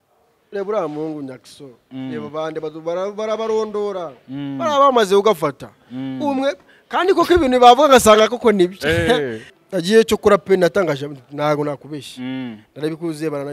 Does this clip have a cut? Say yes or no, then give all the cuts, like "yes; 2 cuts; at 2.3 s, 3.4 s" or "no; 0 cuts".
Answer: yes; 1 cut; at 9.5 s